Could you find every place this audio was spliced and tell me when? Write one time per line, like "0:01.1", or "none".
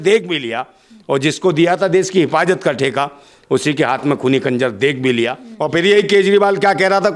0:05.4